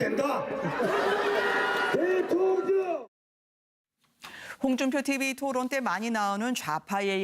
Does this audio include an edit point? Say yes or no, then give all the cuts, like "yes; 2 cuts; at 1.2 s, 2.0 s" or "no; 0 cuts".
no; 0 cuts